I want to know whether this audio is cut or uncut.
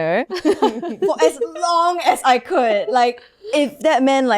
uncut